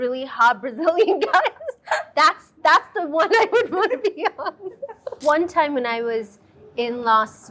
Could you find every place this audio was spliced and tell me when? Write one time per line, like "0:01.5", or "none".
0:05.2